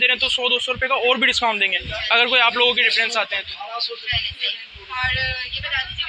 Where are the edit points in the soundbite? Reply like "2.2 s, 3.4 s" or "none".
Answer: none